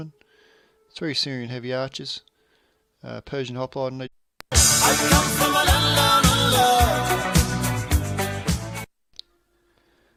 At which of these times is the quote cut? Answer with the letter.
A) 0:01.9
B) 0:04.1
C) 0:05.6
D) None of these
D